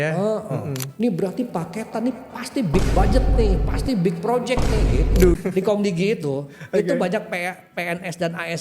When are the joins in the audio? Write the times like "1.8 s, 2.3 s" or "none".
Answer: 0.8 s, 5.4 s